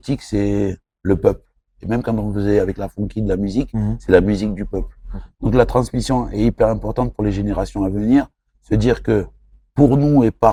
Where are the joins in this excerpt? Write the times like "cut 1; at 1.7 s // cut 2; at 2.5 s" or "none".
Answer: none